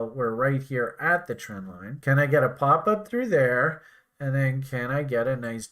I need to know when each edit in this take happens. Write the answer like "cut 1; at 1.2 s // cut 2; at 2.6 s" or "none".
cut 1; at 2.0 s